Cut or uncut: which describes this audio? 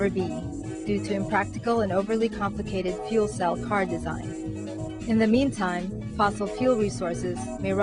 cut